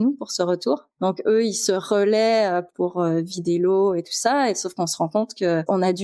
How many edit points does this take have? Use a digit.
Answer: 0